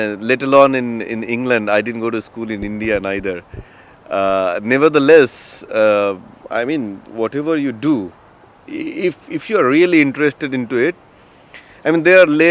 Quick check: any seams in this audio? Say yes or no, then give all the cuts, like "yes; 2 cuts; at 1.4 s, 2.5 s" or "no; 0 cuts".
no; 0 cuts